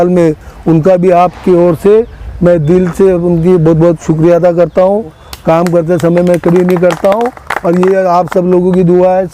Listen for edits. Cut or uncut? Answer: cut